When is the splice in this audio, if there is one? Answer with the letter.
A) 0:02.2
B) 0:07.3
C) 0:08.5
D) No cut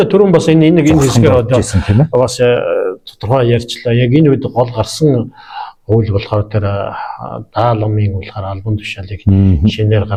D